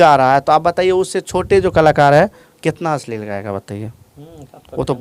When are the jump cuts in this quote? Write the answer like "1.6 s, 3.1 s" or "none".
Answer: none